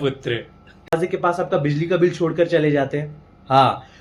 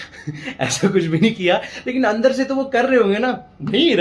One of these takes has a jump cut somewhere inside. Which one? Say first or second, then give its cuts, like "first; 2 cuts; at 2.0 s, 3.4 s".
first; 1 cut; at 0.9 s